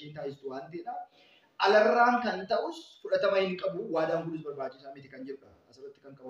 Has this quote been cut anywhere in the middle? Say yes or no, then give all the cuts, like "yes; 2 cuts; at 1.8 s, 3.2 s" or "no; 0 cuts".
no; 0 cuts